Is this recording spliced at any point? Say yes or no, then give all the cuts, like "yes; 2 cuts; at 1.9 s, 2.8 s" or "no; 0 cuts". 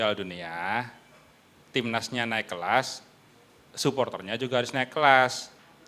no; 0 cuts